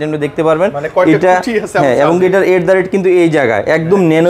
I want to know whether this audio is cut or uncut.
uncut